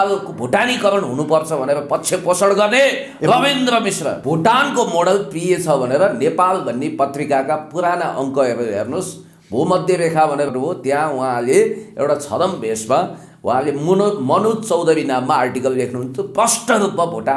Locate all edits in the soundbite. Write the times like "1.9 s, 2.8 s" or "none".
4.2 s

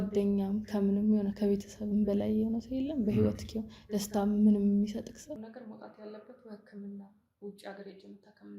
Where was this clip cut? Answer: 5.4 s

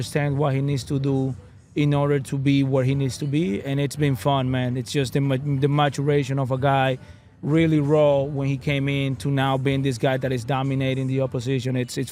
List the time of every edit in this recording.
none

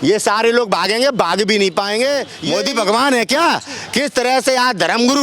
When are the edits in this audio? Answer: 2.4 s

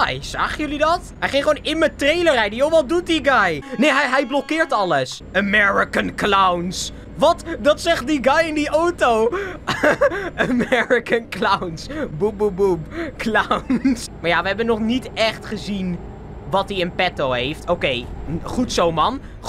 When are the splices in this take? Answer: 1.1 s, 3.6 s, 5.2 s, 14.0 s

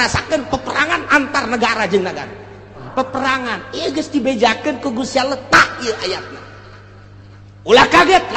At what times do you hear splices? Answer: 2.9 s

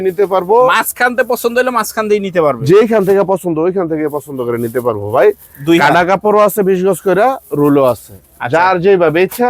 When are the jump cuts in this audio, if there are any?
none

